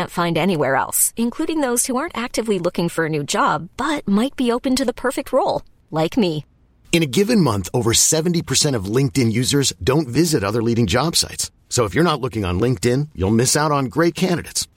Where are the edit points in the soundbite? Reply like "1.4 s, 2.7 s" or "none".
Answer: none